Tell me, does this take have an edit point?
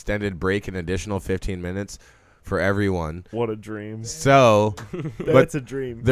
no; 0 cuts

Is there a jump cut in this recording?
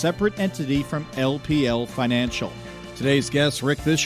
yes; 1 cut; at 2.9 s

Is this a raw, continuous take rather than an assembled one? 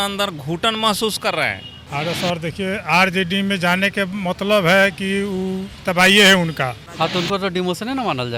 no; 2 cuts; at 1.8 s, 6.8 s

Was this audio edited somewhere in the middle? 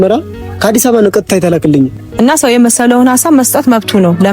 yes; 1 cut; at 2.0 s

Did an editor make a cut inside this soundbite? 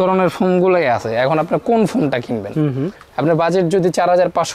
no; 0 cuts

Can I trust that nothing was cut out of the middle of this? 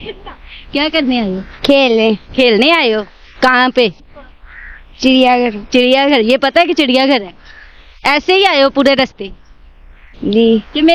yes; 0 cuts

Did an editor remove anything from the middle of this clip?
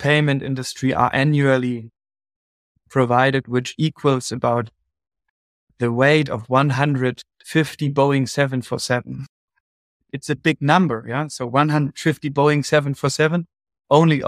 no; 0 cuts

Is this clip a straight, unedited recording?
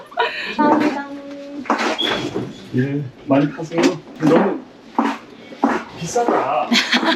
yes; 0 cuts

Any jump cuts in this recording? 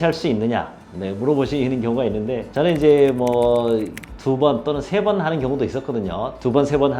no; 0 cuts

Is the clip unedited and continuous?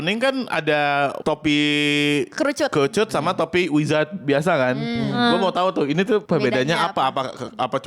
no; 1 cut; at 6.2 s

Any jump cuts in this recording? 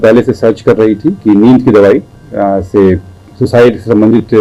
no; 0 cuts

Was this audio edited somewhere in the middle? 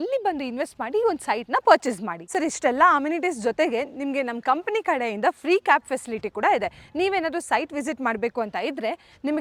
no; 0 cuts

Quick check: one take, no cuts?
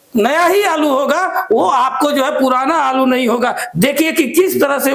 yes; 0 cuts

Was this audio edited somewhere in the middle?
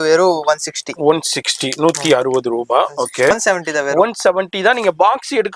yes; 1 cut; at 3.3 s

